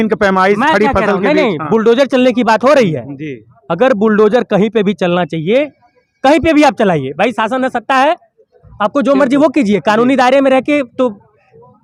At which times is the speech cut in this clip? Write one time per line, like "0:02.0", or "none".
none